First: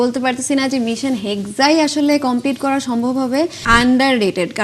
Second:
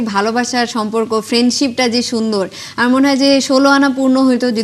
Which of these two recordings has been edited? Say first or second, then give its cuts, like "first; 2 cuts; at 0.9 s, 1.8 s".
first; 1 cut; at 3.6 s